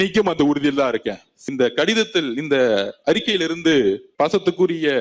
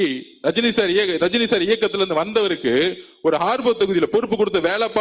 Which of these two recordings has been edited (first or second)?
first